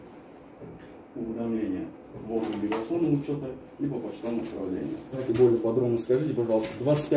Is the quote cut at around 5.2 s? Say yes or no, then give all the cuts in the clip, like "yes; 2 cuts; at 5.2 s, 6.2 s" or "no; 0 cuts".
yes; 1 cut; at 5.2 s